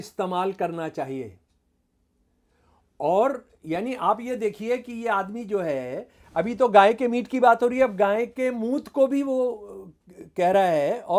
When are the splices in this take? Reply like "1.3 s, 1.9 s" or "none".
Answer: none